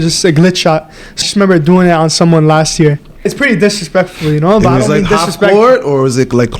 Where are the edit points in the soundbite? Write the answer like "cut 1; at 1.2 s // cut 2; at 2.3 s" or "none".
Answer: cut 1; at 1.2 s // cut 2; at 3.3 s

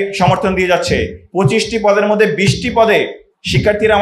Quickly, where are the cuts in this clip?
cut 1; at 1.2 s

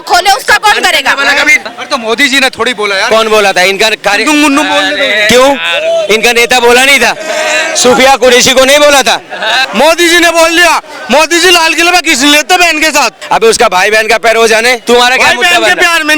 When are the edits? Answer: cut 1; at 1.7 s // cut 2; at 9.6 s // cut 3; at 13.2 s // cut 4; at 14.8 s

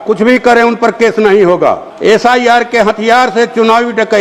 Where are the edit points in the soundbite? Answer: cut 1; at 1.9 s

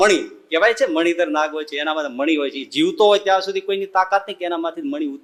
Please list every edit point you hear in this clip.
none

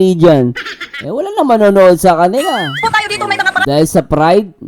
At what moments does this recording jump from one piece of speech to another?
cut 1; at 3.2 s

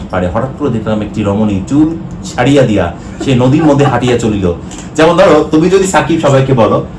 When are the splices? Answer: cut 1; at 4.7 s

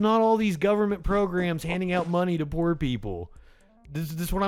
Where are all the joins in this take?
none

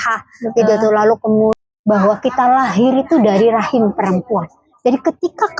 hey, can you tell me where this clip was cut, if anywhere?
cut 1; at 1.5 s

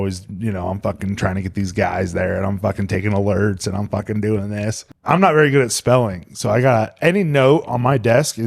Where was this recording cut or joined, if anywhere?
cut 1; at 4.9 s

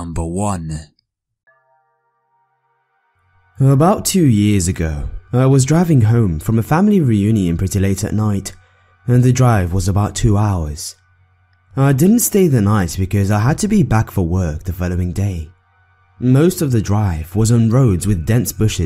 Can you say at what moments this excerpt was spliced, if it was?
none

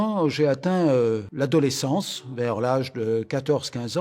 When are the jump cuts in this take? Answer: cut 1; at 1.3 s

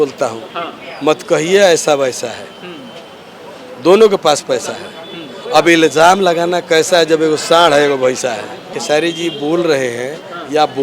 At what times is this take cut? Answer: cut 1; at 8.7 s

